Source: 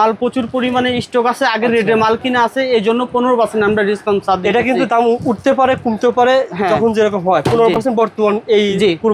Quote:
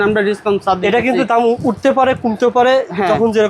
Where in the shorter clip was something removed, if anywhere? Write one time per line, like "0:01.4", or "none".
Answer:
none